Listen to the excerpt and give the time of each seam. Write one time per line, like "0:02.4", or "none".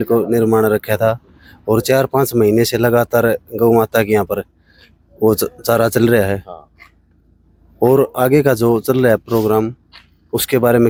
none